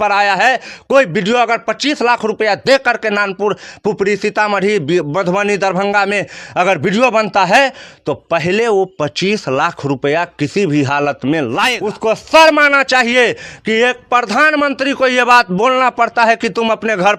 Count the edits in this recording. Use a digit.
1